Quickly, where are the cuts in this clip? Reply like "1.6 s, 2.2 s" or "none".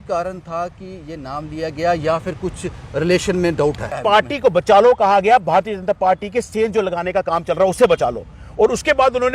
3.9 s